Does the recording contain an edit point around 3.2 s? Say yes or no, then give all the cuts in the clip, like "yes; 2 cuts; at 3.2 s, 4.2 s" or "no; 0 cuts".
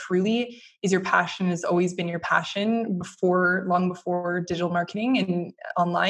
no; 0 cuts